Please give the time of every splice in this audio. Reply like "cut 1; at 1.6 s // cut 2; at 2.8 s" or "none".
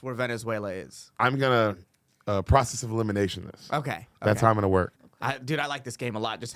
cut 1; at 1.2 s // cut 2; at 5.0 s